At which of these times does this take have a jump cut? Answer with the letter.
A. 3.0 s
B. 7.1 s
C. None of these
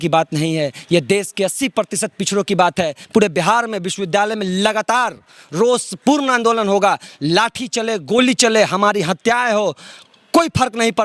A